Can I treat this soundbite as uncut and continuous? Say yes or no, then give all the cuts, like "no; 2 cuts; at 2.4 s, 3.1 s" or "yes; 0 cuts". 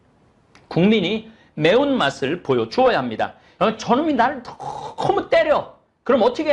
no; 1 cut; at 3.4 s